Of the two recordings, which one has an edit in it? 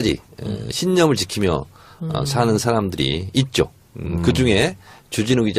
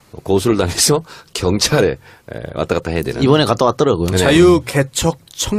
first; 1 cut; at 3.2 s

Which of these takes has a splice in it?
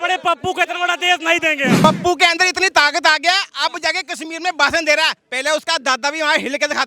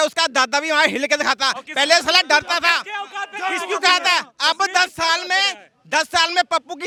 first; 1 cut; at 1.8 s

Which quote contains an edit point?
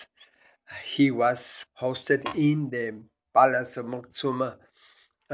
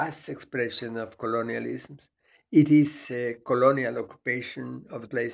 first; 1 cut; at 1.5 s

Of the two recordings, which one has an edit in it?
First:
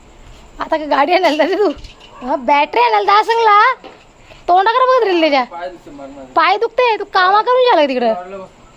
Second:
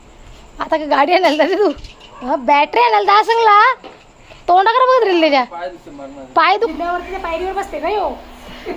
second; 1 cut; at 6.7 s

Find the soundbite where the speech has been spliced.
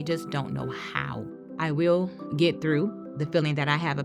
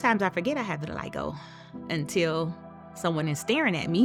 first; 1 cut; at 1.4 s

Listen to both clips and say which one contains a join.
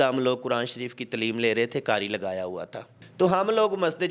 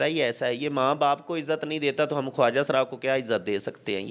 first; 1 cut; at 3.0 s

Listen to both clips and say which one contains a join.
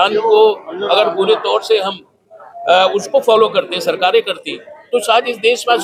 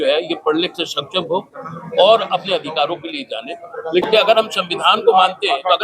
second; 1 cut; at 4.0 s

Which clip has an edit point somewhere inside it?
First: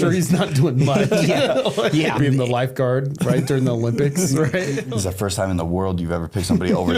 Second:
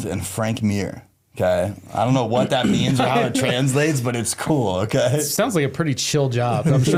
first; 2 cuts; at 2.2 s, 4.8 s

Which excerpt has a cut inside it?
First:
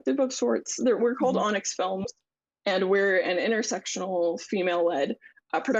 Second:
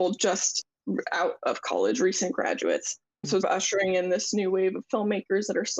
second; 1 cut; at 3.4 s

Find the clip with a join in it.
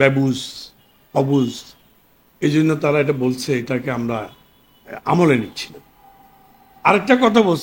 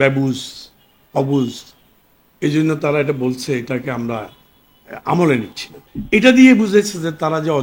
second; 1 cut; at 5.9 s

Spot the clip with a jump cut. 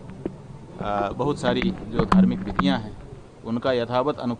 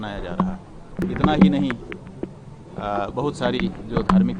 second; 1 cut; at 0.9 s

